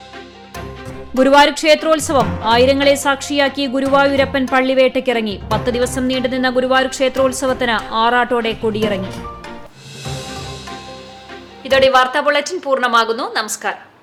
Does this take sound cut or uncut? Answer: uncut